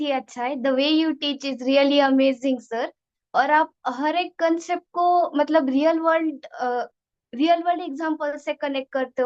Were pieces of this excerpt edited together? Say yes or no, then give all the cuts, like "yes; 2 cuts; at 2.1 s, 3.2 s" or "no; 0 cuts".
no; 0 cuts